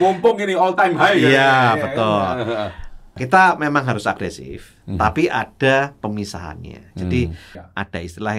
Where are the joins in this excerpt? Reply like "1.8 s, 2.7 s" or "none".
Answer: 3.1 s, 7.6 s